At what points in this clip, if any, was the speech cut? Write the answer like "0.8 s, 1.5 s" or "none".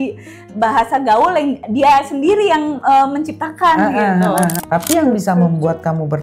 4.6 s